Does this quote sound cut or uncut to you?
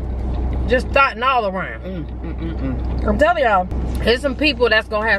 uncut